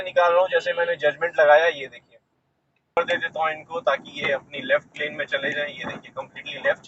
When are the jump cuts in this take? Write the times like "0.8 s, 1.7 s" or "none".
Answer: 3.0 s